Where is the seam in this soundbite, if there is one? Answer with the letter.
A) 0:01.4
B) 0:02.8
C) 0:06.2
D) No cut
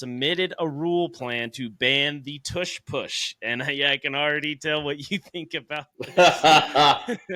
D